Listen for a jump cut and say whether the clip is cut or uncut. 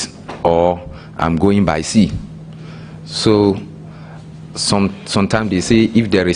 uncut